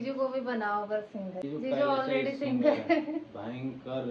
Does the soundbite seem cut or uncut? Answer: cut